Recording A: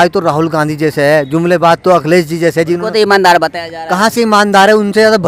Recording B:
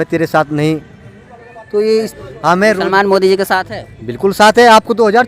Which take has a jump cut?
B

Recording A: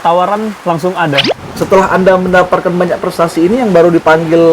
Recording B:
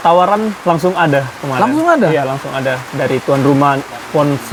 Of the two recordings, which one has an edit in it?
A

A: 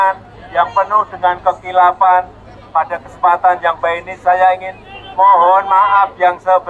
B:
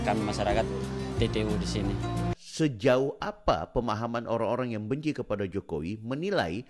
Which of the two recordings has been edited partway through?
B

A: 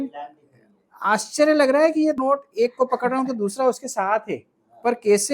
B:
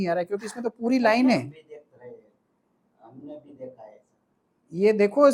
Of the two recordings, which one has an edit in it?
A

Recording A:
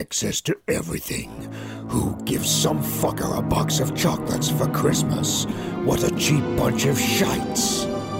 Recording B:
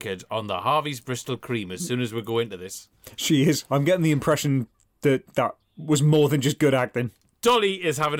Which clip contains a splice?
B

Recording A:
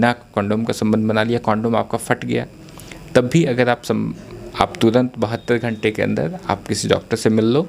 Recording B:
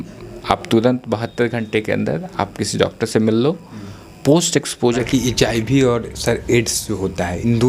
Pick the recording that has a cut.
B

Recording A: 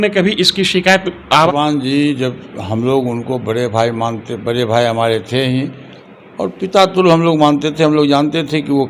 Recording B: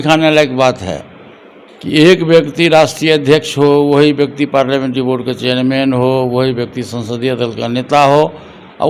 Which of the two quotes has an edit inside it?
A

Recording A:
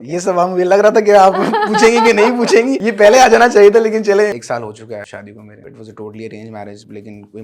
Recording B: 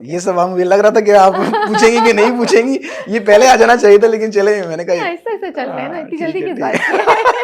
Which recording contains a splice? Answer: A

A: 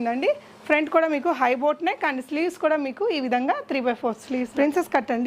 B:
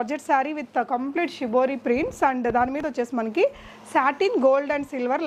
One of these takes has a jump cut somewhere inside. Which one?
A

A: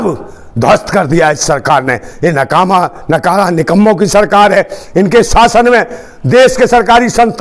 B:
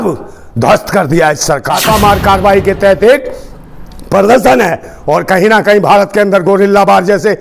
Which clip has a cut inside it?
B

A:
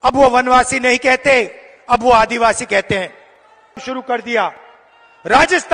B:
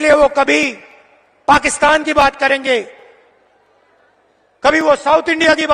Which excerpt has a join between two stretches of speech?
A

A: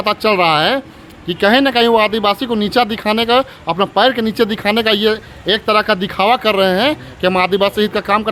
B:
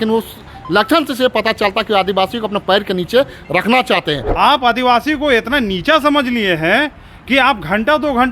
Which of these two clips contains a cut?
B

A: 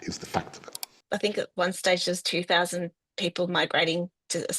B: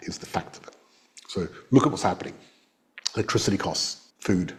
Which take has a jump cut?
A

